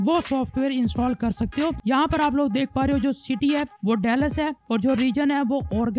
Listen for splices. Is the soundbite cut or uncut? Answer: cut